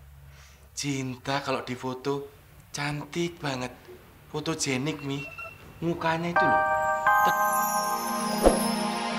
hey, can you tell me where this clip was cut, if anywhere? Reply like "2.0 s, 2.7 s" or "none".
6.3 s